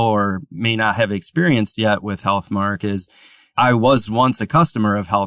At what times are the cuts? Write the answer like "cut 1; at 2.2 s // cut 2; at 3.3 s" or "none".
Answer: cut 1; at 3.5 s